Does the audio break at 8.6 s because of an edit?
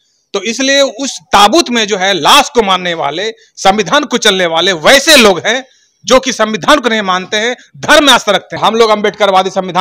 yes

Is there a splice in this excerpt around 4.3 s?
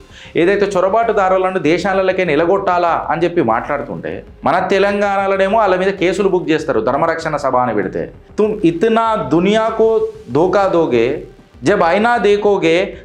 yes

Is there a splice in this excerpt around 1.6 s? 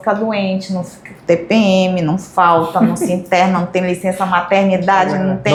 no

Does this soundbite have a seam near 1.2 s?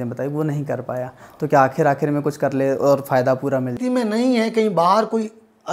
no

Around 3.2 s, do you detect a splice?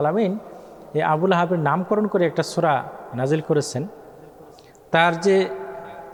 no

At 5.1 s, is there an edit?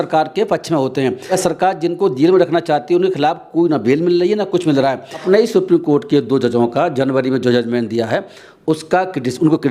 yes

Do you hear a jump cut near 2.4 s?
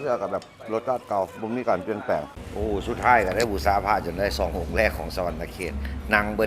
yes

